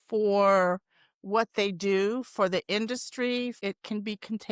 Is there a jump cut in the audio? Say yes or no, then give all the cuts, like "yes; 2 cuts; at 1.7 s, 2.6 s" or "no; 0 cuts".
yes; 1 cut; at 3.6 s